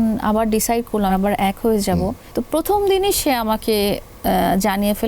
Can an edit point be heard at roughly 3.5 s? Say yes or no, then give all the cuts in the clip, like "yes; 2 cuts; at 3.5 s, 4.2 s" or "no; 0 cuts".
no; 2 cuts; at 1.2 s, 2.2 s